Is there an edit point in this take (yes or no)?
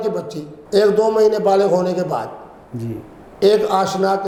no